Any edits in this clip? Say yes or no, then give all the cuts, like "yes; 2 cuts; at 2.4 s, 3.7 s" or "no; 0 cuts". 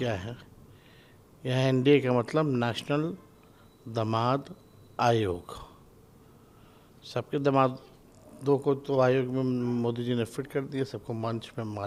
no; 0 cuts